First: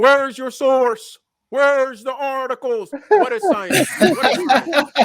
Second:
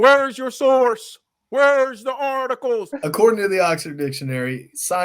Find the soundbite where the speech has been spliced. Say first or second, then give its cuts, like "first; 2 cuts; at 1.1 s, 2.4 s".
second; 1 cut; at 2.9 s